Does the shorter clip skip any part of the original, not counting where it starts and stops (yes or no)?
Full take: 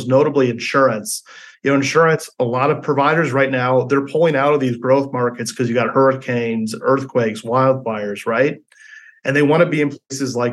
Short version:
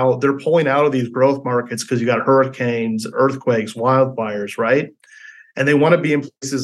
no